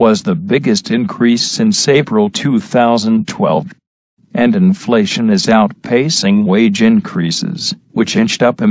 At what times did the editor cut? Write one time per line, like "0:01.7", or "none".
0:02.0